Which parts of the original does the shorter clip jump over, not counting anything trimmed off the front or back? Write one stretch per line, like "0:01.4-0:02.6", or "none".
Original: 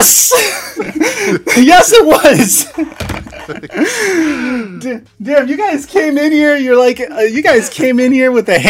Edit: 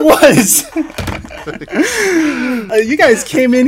0:04.7-0:07.1